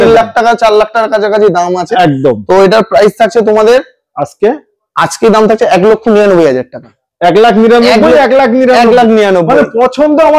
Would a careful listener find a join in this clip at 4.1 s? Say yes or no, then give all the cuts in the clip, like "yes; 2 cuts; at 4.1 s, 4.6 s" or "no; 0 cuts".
no; 0 cuts